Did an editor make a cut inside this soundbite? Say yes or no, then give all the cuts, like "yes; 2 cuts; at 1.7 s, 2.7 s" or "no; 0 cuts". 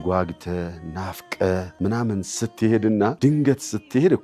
yes; 2 cuts; at 1.7 s, 3.1 s